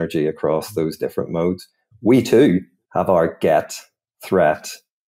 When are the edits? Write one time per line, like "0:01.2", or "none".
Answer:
0:02.8